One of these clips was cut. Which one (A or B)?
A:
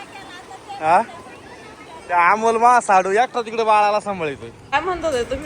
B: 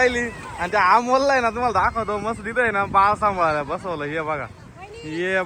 A